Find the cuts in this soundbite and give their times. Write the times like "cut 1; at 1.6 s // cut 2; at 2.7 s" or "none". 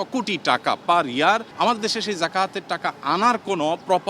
cut 1; at 1.5 s